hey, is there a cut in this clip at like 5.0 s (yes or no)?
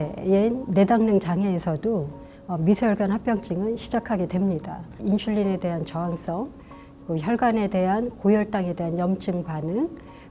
yes